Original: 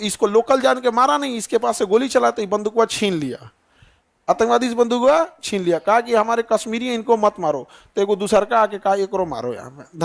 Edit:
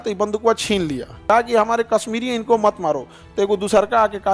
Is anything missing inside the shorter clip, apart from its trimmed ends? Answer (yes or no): yes